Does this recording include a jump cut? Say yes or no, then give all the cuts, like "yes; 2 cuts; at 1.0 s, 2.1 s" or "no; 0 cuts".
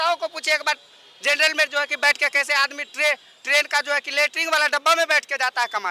no; 0 cuts